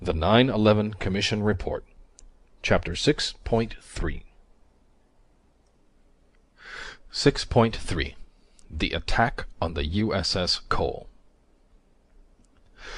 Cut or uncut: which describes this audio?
uncut